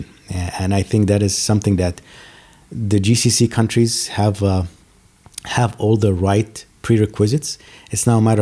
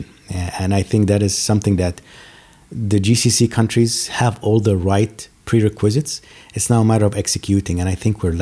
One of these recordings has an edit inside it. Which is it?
second; 1 cut; at 4.0 s

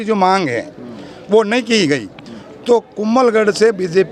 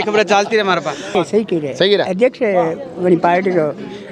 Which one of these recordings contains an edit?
second; 1 cut; at 1.1 s

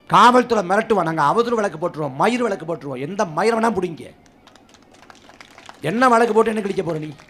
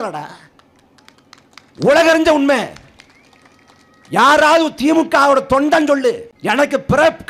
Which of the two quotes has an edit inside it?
second; 1 cut; at 6.3 s

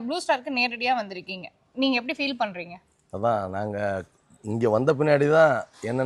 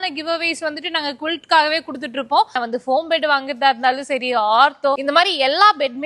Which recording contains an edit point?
second; 2 cuts; at 2.5 s, 5.0 s

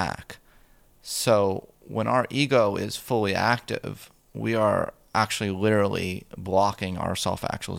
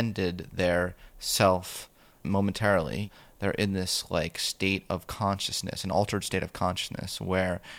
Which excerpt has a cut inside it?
second; 2 cuts; at 2.2 s, 3.1 s

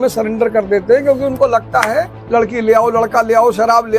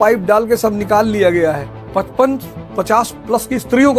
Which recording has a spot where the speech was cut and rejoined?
first; 1 cut; at 2.2 s

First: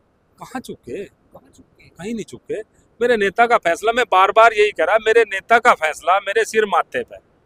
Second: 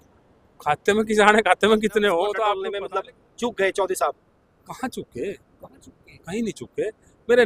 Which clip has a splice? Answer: second; 1 cut; at 2.5 s

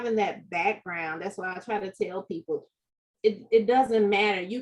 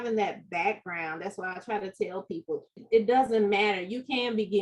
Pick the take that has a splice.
second; 1 cut; at 2.8 s

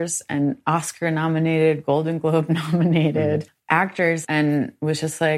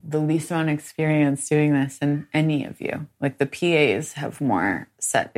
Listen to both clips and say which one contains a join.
first; 1 cut; at 4.1 s

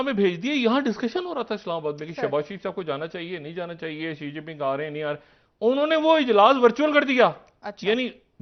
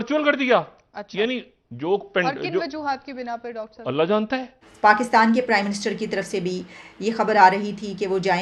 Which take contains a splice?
second; 1 cut; at 4.6 s

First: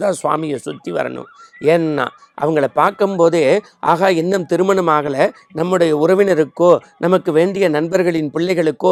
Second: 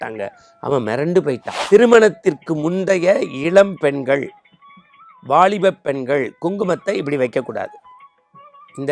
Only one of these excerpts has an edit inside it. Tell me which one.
second; 1 cut; at 1.5 s

